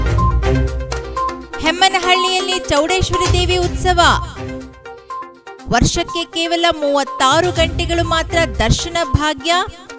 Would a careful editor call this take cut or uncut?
cut